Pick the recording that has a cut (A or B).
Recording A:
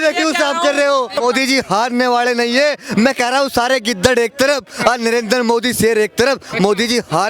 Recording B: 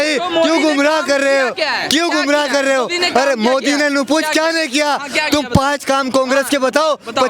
A